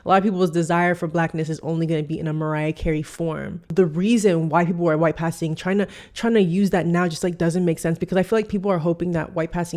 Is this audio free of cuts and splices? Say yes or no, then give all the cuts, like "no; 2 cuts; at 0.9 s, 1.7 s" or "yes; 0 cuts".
no; 1 cut; at 3.6 s